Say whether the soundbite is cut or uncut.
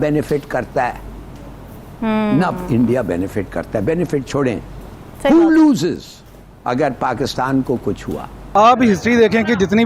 cut